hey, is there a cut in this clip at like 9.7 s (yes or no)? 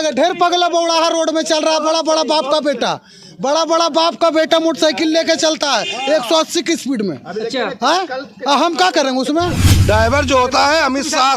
yes